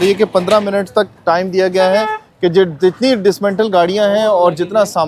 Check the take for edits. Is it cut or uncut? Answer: uncut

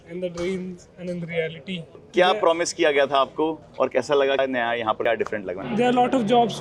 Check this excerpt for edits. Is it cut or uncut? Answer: cut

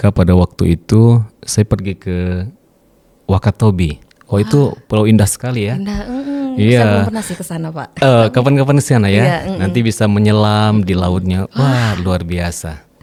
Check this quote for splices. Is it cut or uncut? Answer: uncut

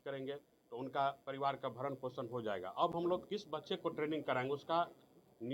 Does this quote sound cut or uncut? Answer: uncut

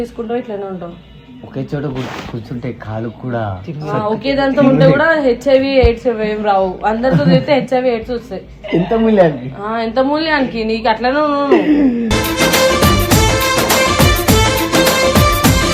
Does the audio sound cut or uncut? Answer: uncut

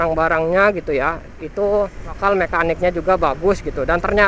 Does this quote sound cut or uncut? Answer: cut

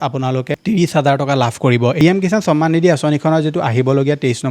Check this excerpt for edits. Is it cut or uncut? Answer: cut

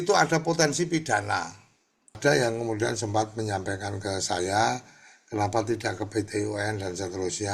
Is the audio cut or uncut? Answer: cut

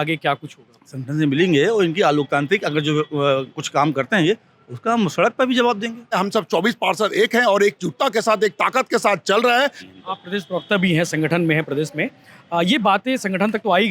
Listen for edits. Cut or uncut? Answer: cut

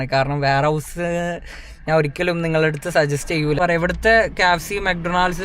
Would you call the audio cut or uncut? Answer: cut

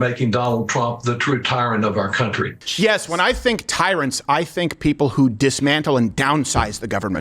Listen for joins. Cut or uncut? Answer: cut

